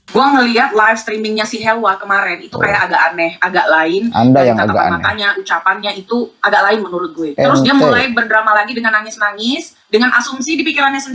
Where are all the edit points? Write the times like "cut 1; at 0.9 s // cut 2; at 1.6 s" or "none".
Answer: none